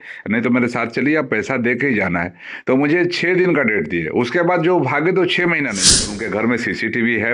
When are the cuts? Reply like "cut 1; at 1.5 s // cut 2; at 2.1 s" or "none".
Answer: cut 1; at 6.2 s

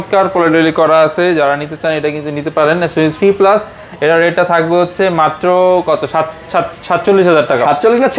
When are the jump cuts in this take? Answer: none

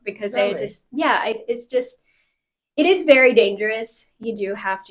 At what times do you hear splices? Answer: none

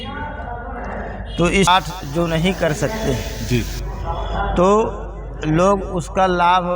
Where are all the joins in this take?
cut 1; at 1.7 s

